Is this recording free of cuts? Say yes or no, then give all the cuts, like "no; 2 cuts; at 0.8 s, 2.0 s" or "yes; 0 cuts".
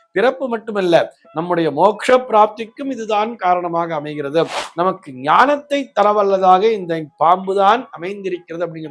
yes; 0 cuts